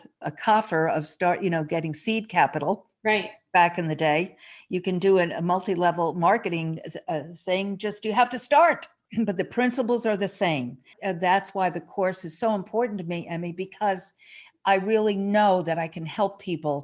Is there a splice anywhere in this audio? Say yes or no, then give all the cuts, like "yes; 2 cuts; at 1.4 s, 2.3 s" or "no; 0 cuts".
yes; 2 cuts; at 9.0 s, 10.9 s